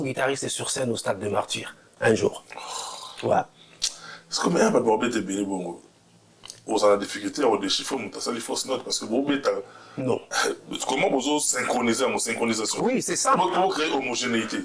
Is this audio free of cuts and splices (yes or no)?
yes